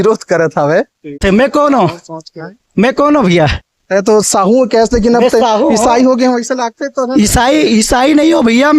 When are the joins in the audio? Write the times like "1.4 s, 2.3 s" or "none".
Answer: 1.2 s